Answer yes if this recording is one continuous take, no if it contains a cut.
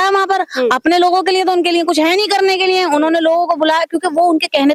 yes